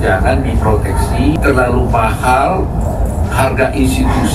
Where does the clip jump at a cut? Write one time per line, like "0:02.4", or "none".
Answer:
0:01.4